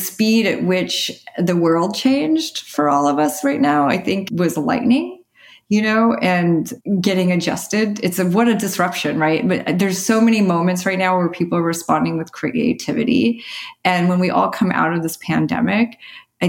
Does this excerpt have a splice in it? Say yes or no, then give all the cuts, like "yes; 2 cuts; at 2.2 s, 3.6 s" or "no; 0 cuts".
yes; 3 cuts; at 2.6 s, 4.2 s, 6.8 s